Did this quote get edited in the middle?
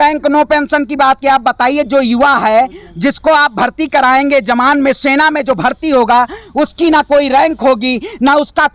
no; 0 cuts

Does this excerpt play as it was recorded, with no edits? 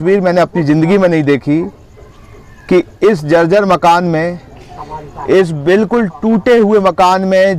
yes; 0 cuts

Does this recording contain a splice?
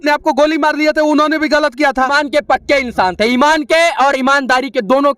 yes; 1 cut; at 2.1 s

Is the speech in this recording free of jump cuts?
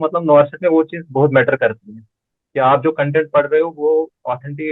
yes; 0 cuts

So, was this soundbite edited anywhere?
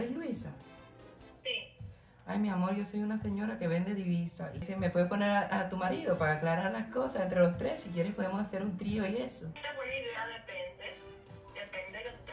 yes; 2 cuts; at 4.7 s, 9.6 s

